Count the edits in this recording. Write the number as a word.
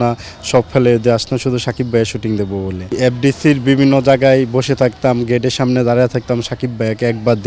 one